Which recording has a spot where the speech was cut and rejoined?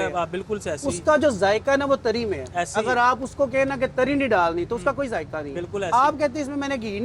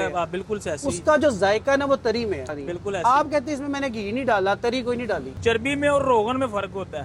second; 2 cuts; at 2.5 s, 5.3 s

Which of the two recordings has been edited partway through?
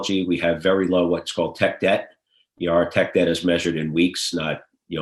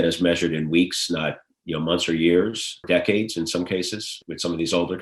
second; 2 cuts; at 2.8 s, 4.2 s

